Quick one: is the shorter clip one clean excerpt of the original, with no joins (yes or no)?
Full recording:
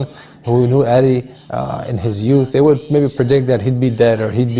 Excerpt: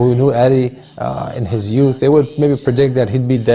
yes